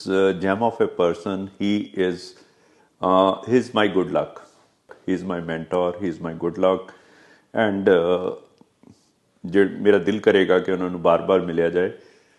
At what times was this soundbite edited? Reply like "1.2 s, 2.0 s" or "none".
4.9 s